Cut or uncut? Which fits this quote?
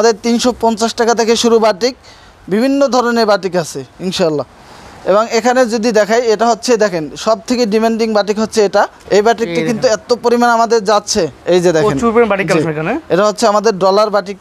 uncut